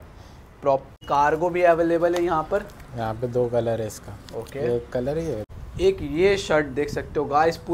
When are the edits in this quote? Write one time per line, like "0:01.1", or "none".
0:00.9
0:05.6

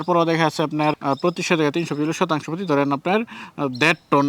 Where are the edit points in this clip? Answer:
0:01.0

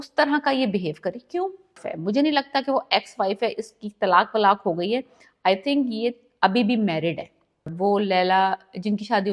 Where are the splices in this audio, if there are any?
0:01.9
0:07.7

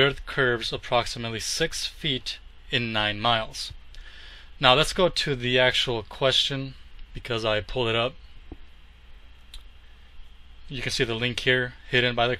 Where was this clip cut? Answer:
0:01.2

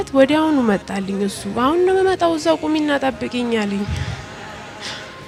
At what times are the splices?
none

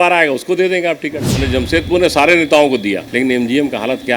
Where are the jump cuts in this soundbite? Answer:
0:01.3
0:03.1

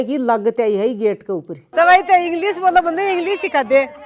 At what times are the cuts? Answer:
0:01.6

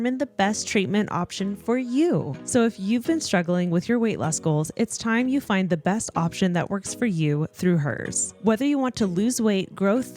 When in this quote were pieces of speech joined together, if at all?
0:02.3

